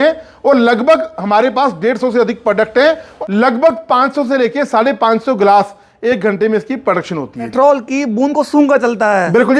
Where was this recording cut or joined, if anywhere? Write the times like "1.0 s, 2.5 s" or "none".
3.1 s, 7.5 s

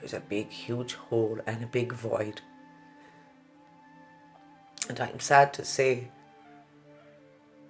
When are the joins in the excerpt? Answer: 2.4 s, 4.8 s

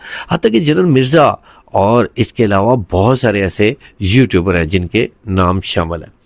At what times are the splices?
none

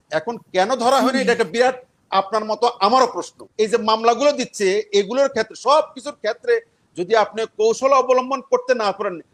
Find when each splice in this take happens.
3.4 s

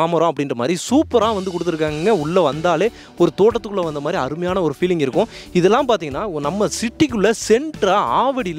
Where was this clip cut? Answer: none

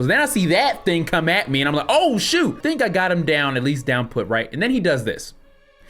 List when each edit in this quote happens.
2.6 s

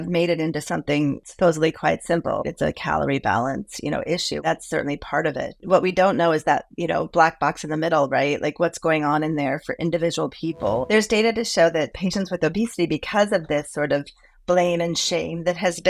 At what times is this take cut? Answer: 1.2 s, 2.4 s, 4.4 s, 5.6 s, 10.8 s

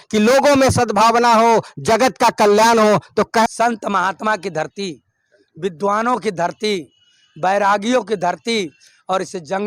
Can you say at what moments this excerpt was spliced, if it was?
3.5 s

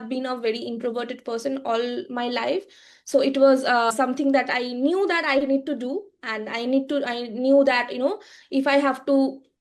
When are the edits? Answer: none

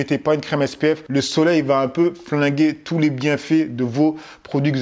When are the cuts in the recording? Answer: none

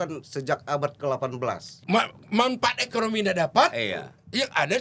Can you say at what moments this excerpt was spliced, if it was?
1.7 s

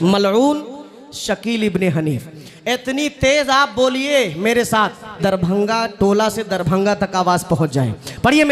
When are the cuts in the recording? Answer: 5.2 s

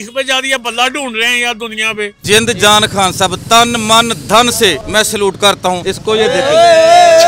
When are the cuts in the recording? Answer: 2.2 s, 4.8 s, 5.8 s

